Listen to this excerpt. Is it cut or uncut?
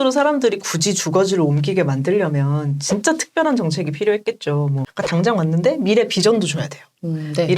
cut